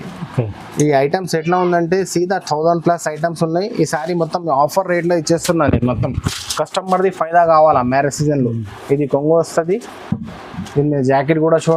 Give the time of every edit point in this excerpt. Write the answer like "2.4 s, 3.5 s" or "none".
none